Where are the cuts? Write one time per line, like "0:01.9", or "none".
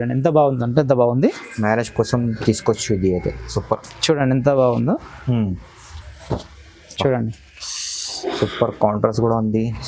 none